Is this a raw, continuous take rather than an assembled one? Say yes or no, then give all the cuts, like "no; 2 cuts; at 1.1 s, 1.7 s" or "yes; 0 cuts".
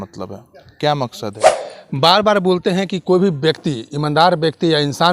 no; 1 cut; at 1.5 s